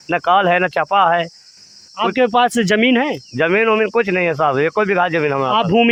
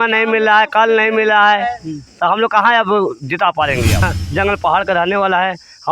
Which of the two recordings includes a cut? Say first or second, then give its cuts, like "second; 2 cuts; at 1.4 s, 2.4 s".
second; 1 cut; at 4.2 s